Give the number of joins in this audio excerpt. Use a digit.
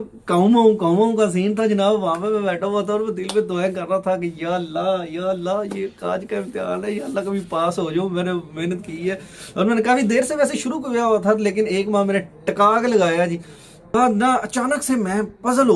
1